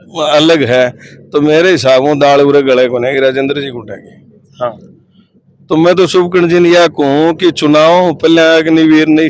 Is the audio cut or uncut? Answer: cut